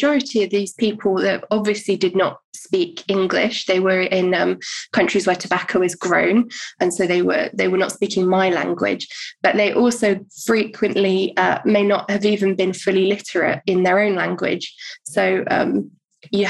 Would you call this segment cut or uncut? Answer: uncut